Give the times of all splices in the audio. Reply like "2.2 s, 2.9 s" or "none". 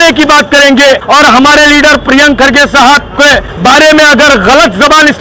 1.0 s, 3.5 s